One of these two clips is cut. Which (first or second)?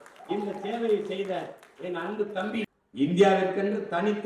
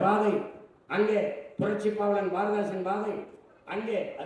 first